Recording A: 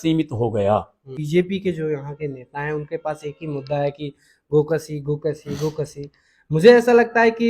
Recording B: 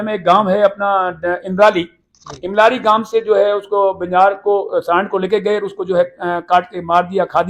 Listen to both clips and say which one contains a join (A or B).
A